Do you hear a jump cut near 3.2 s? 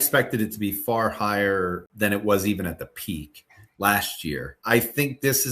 no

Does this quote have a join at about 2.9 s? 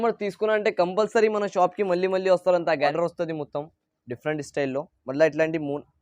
yes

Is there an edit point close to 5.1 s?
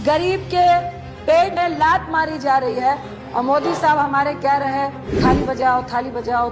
yes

